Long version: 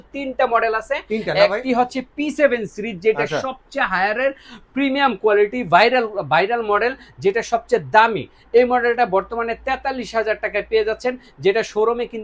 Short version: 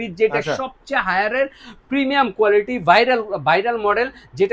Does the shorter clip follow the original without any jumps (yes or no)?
yes